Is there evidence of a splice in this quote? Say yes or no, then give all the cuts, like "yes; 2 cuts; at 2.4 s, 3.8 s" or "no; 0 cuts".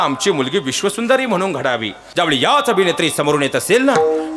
yes; 1 cut; at 2.0 s